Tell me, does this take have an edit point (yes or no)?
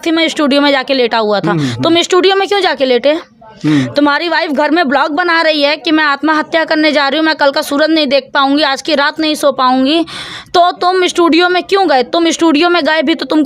no